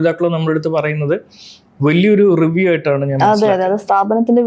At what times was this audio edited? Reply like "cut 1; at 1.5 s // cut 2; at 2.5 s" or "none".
none